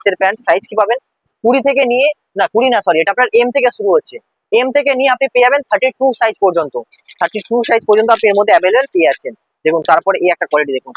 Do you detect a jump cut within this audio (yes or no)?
no